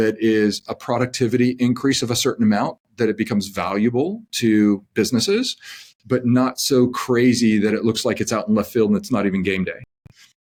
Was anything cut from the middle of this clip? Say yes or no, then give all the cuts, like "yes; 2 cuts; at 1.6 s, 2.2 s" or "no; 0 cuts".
no; 0 cuts